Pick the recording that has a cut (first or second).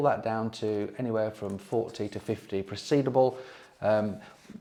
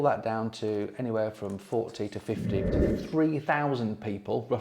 second